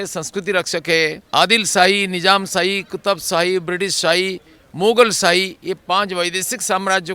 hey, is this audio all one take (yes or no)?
no